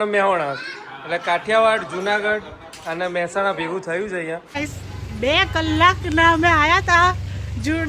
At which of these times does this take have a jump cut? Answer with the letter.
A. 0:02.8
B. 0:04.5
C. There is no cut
B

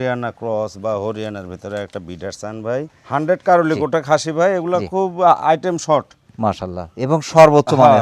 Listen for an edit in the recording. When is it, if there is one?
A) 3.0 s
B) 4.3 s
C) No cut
A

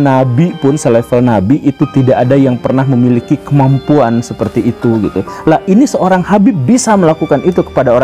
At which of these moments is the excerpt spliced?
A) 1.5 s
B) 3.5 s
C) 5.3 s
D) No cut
C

